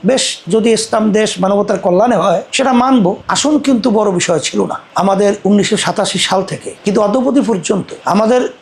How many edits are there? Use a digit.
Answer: 2